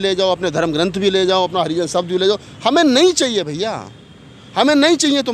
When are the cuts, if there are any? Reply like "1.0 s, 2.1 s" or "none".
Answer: none